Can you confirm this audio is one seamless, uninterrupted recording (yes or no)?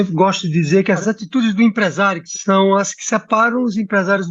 no